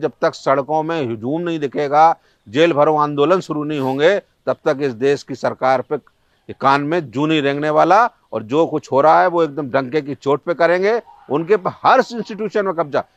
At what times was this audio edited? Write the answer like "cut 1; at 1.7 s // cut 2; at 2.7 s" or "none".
none